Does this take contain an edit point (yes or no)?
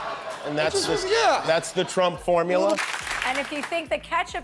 yes